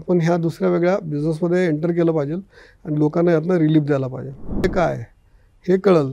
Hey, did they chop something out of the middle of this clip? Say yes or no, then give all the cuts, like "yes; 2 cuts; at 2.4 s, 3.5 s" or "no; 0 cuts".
yes; 1 cut; at 4.6 s